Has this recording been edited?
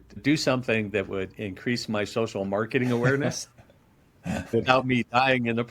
yes; 1 cut; at 4.5 s

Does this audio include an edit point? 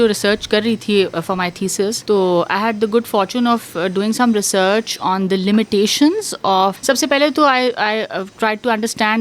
yes; 2 cuts; at 2.0 s, 6.8 s

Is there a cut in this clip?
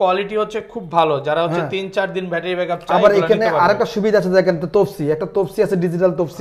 no; 0 cuts

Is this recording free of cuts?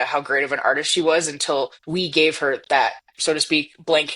no; 2 cuts; at 1.8 s, 3.1 s

